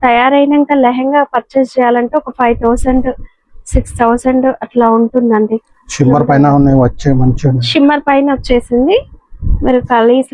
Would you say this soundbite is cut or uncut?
uncut